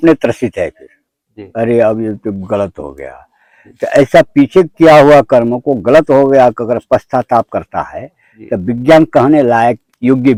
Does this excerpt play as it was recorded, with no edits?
yes; 0 cuts

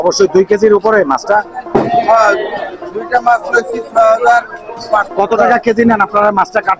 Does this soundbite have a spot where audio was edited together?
yes; 1 cut; at 5.1 s

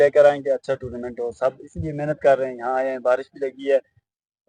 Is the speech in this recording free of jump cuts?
yes; 0 cuts

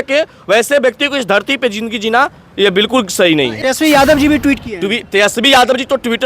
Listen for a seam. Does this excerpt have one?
yes; 1 cut; at 3.6 s

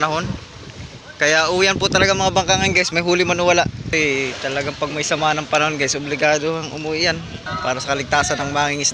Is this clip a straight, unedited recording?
no; 2 cuts; at 3.9 s, 7.5 s

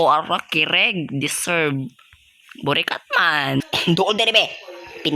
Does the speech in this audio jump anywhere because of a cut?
yes; 1 cut; at 3.6 s

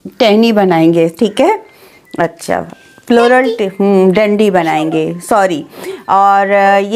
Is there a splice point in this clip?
no; 0 cuts

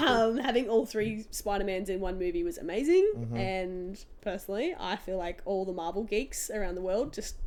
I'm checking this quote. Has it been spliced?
no; 0 cuts

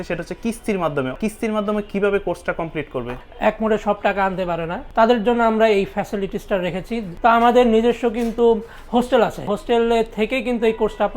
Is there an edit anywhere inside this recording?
yes; 5 cuts; at 1.2 s, 3.2 s, 4.8 s, 7.1 s, 9.6 s

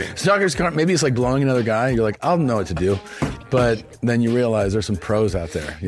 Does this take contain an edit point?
no; 0 cuts

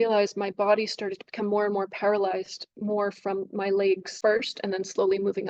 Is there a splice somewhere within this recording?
yes; 1 cut; at 4.1 s

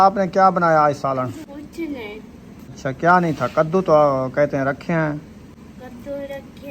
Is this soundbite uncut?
no; 2 cuts; at 1.4 s, 2.8 s

